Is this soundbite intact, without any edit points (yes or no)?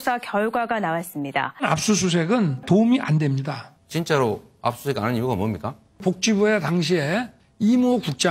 no